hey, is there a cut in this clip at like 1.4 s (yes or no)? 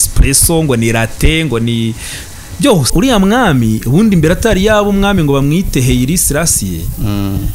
no